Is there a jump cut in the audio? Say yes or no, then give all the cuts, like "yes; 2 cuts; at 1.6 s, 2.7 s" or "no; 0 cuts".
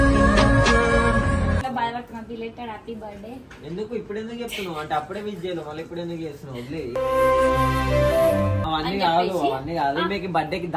yes; 2 cuts; at 1.6 s, 8.6 s